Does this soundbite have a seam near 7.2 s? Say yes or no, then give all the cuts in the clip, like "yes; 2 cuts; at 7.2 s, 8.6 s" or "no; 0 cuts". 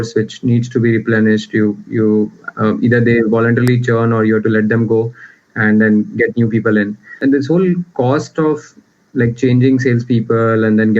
yes; 1 cut; at 7.2 s